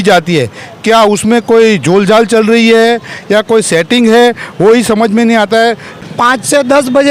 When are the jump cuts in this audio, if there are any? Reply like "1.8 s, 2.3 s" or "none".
5.9 s